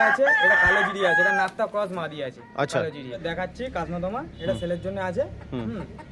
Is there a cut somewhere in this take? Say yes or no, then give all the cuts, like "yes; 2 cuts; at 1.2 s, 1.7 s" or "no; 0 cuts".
yes; 1 cut; at 3.2 s